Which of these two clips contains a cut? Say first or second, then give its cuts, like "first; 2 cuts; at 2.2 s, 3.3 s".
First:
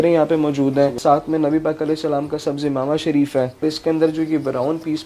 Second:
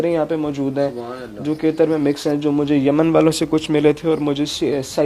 first; 2 cuts; at 1.0 s, 3.6 s